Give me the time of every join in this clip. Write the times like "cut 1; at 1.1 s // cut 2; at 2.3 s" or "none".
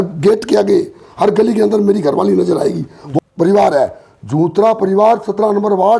cut 1; at 3.0 s